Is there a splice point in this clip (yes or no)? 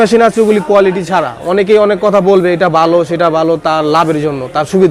no